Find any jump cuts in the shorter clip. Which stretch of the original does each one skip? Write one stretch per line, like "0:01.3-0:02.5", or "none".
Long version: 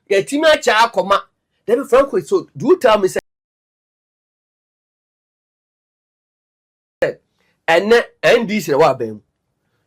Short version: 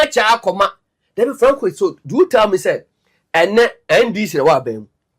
0:03.1-0:07.0